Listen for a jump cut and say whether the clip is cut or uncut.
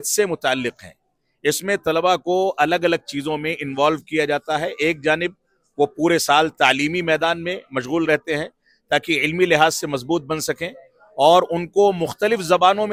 uncut